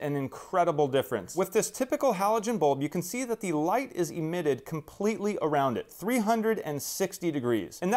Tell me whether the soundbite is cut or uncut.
cut